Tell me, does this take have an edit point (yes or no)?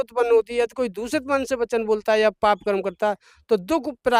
no